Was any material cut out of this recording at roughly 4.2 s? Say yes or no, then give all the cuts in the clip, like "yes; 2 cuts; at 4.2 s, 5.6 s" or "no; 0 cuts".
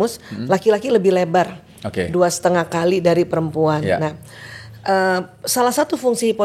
no; 0 cuts